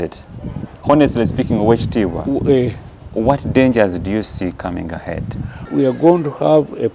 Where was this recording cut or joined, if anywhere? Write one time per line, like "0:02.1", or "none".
0:05.6